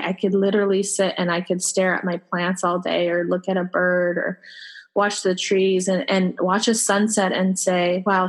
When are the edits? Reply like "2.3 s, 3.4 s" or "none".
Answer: none

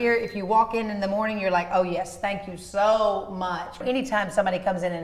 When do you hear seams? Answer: 3.8 s

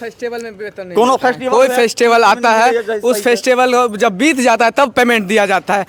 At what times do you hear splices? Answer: none

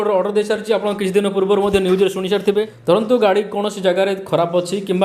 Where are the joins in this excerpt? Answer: 2.7 s

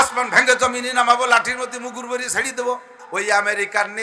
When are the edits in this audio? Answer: 3.0 s

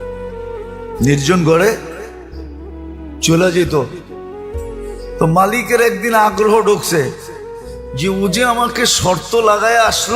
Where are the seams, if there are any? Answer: 0.9 s

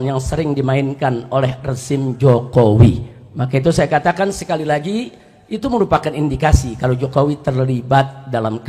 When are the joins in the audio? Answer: none

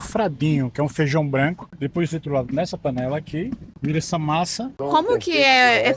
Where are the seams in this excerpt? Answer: 1.7 s, 3.7 s, 4.8 s

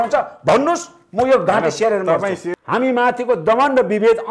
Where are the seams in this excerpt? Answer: 2.5 s

